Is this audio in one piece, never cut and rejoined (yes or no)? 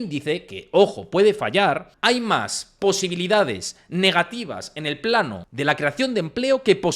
no